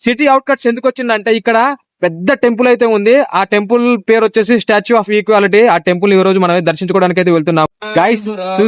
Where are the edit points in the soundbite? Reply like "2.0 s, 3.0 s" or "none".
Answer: 7.7 s